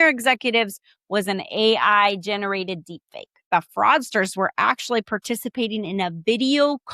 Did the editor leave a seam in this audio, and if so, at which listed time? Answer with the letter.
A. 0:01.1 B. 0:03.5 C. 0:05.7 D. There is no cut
B